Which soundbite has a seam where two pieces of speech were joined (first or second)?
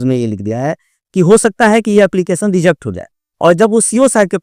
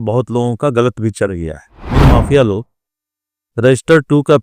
second